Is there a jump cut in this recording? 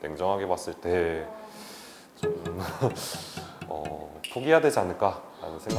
no; 0 cuts

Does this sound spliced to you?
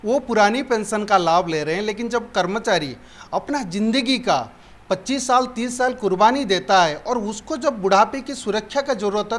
no; 0 cuts

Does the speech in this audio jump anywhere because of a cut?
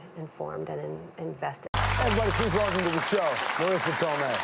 no; 0 cuts

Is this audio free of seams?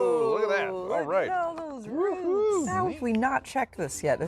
no; 1 cut; at 2.7 s

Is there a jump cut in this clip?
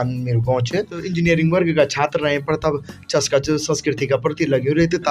yes; 1 cut; at 1.1 s

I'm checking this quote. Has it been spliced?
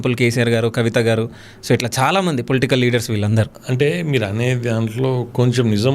yes; 1 cut; at 3.6 s

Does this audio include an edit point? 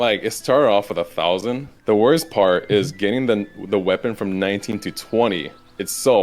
yes; 1 cut; at 1.7 s

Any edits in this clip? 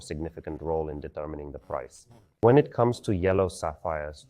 yes; 1 cut; at 2.4 s

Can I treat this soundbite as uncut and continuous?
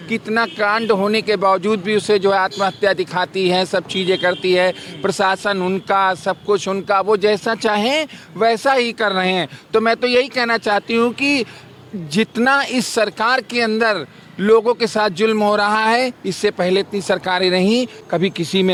yes; 0 cuts

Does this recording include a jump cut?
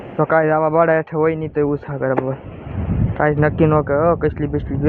no; 0 cuts

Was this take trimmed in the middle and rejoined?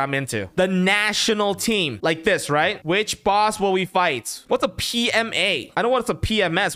yes; 3 cuts; at 1.9 s, 2.8 s, 4.4 s

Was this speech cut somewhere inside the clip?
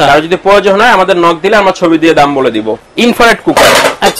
yes; 1 cut; at 2.8 s

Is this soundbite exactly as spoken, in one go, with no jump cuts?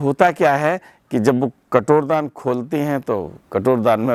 yes; 0 cuts

